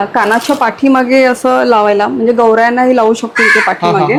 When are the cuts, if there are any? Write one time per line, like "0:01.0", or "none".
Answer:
none